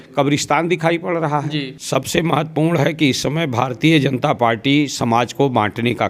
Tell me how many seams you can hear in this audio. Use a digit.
1